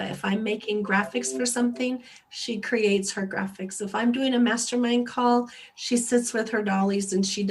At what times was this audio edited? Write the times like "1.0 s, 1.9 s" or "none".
none